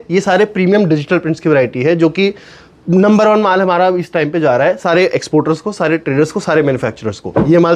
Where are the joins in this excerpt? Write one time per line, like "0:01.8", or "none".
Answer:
none